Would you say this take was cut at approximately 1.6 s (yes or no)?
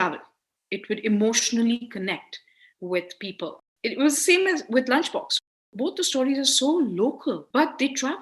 no